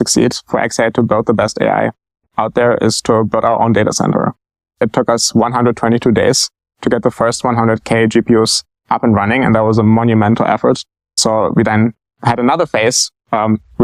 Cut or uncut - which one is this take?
cut